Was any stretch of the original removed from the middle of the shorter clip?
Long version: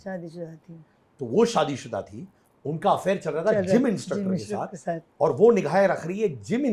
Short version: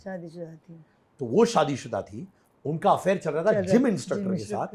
no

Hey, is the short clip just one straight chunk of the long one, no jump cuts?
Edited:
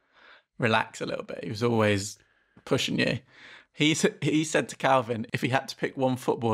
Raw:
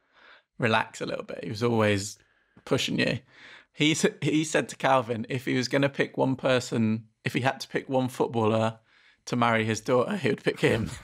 no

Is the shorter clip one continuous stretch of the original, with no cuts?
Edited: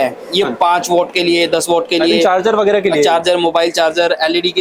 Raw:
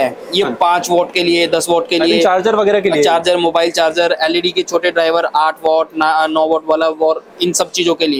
yes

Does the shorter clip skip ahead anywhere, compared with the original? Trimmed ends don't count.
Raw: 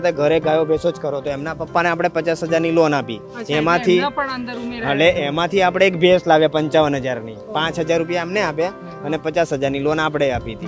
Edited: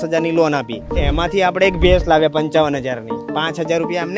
yes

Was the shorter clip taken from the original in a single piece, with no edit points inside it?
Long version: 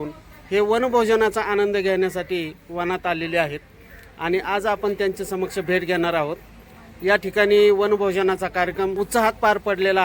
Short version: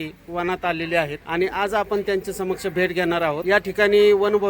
no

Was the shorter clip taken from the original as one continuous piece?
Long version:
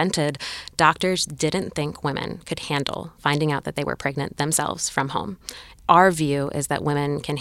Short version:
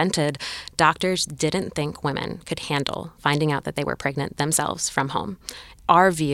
yes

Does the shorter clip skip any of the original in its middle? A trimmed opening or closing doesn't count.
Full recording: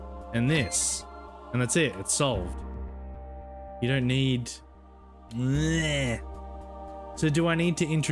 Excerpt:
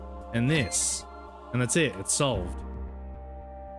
no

